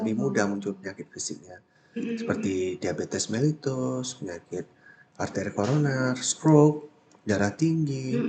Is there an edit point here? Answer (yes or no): no